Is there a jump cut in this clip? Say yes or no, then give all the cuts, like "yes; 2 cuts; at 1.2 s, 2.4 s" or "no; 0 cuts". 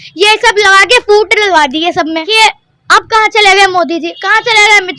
yes; 1 cut; at 2.3 s